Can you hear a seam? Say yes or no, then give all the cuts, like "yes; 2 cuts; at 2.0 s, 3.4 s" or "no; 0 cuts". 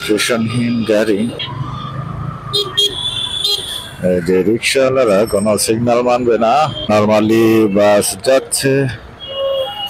yes; 2 cuts; at 1.4 s, 6.9 s